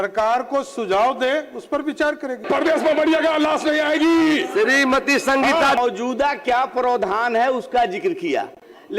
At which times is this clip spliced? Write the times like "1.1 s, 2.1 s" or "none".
2.5 s, 5.8 s